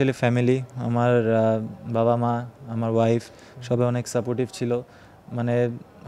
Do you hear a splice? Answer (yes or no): no